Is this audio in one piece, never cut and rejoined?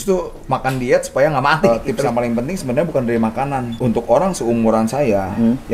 no; 2 cuts; at 1.7 s, 3.7 s

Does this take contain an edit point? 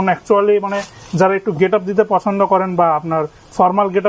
no; 0 cuts

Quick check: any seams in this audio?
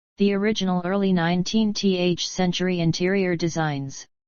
no; 0 cuts

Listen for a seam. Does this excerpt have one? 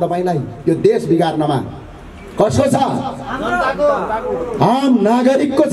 no; 0 cuts

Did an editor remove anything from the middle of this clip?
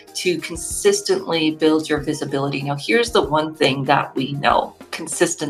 no; 0 cuts

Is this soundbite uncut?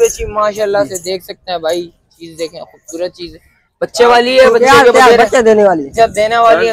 yes; 0 cuts

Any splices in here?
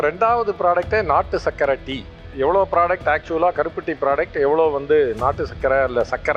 no; 0 cuts

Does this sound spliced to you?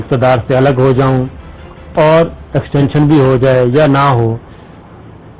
no; 0 cuts

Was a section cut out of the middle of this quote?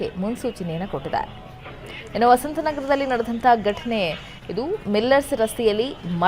yes; 1 cut; at 2.0 s

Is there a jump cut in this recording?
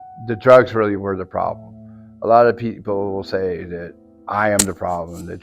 no; 0 cuts

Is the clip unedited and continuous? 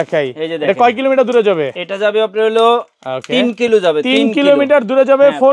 yes; 0 cuts

